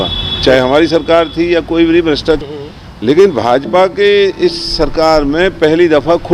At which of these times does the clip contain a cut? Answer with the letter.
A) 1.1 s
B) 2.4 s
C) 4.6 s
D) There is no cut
B